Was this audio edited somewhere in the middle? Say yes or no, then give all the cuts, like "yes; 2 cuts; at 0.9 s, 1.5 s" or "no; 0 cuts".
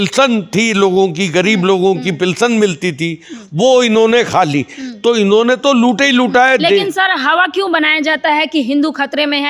no; 0 cuts